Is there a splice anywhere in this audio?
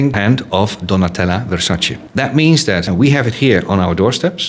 yes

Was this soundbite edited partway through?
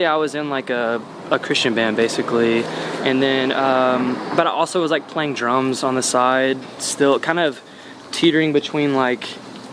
no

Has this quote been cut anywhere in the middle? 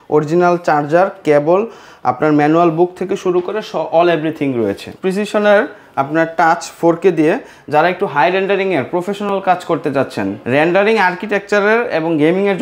yes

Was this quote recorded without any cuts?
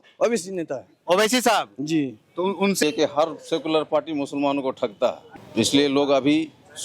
no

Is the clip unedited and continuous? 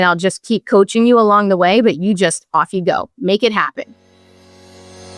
no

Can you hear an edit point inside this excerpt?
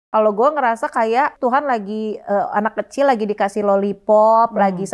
yes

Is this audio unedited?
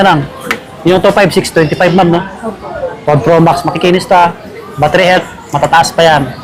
yes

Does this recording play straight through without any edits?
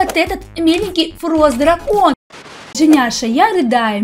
no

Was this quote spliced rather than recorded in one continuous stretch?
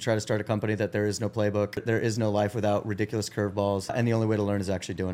yes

